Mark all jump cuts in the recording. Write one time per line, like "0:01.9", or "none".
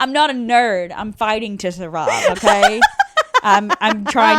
none